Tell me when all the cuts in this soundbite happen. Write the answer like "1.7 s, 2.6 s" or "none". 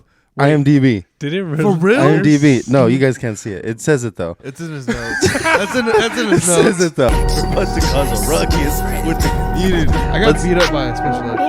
7.1 s